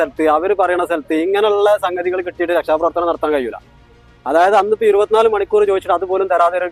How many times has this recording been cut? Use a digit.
0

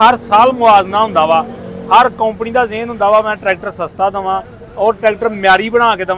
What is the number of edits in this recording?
0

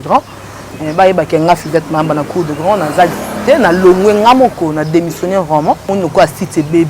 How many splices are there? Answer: 1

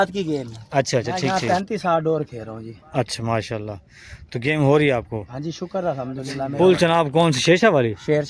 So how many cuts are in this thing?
2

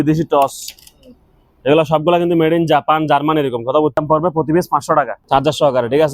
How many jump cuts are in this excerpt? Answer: 2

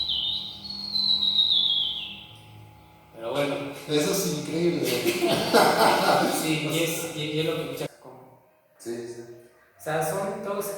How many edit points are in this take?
1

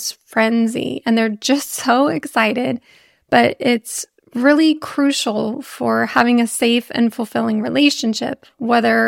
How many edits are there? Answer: 0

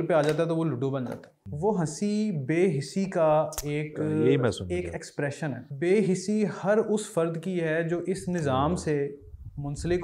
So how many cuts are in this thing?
2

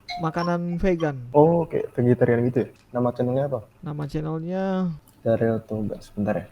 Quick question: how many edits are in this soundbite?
4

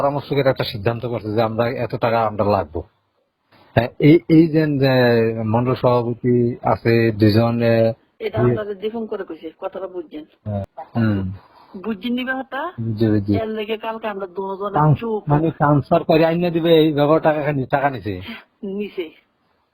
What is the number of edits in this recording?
1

